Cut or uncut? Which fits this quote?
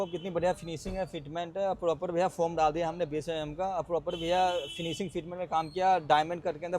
uncut